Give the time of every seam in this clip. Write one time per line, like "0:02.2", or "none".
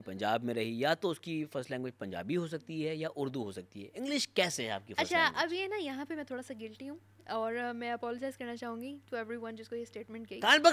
none